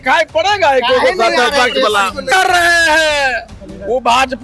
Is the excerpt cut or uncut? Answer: cut